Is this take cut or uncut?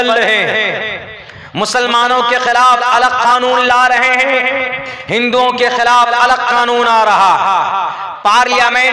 uncut